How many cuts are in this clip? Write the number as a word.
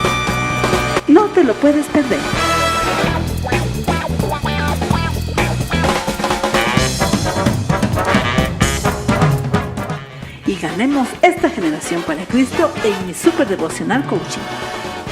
one